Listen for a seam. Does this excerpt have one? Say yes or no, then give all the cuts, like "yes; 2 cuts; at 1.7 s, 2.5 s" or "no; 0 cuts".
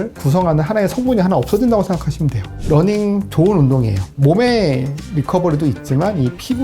yes; 2 cuts; at 2.6 s, 4.1 s